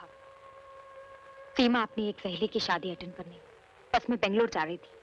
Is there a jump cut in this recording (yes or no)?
no